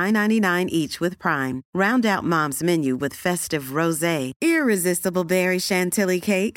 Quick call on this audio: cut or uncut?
uncut